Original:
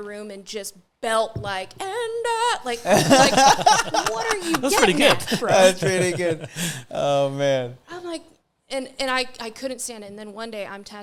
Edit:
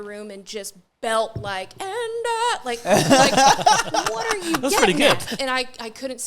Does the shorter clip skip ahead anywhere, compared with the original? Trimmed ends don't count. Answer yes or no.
yes